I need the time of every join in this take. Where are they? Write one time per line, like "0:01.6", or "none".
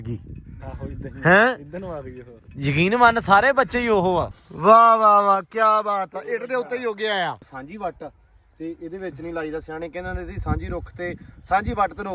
0:04.4
0:07.6

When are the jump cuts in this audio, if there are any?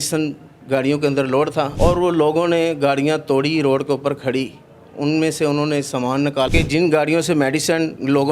0:01.7
0:06.5

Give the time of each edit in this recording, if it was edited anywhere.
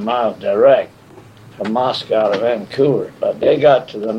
0:03.1

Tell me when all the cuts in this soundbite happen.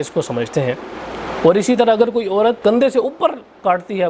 0:01.0
0:02.6

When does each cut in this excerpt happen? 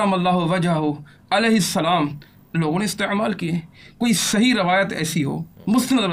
none

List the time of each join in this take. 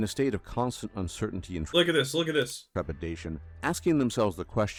none

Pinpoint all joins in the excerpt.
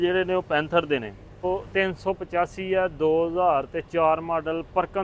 0:01.4

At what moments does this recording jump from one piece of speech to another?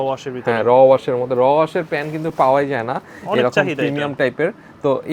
none

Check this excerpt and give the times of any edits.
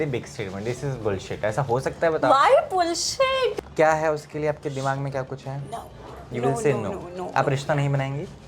0:03.5

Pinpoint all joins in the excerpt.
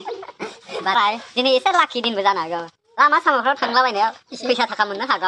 0:01.0

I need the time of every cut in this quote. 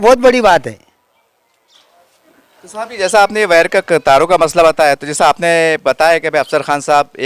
none

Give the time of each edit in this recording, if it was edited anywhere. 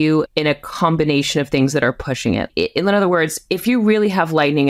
0:02.5

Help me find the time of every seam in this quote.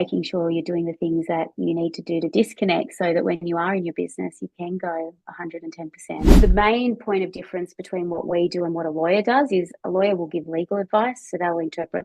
0:06.3

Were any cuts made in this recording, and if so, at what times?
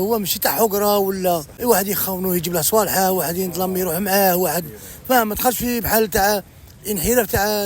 0:01.5

